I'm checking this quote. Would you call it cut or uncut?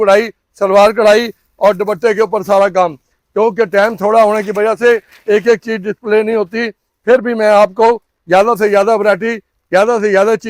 uncut